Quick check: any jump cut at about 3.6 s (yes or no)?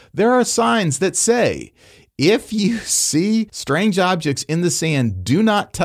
yes